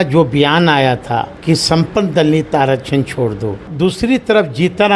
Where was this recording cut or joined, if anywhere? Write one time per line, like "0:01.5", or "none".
0:01.3
0:03.7

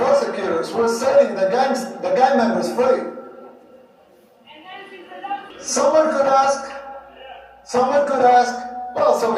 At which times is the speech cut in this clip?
0:05.5

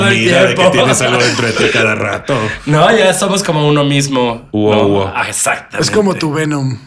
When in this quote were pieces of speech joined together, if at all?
none

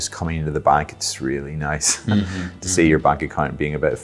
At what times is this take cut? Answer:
none

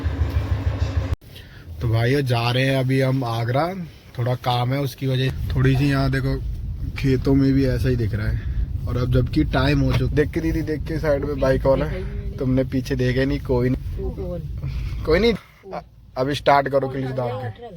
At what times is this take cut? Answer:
0:01.2
0:05.3
0:10.1
0:13.8
0:15.4

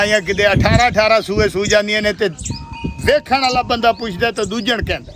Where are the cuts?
none

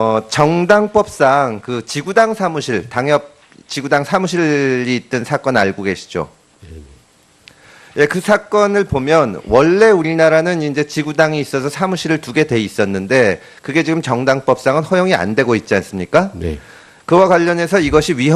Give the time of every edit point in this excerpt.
0:02.9

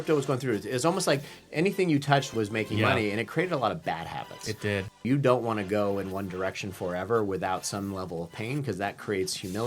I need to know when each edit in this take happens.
0:02.3
0:05.0

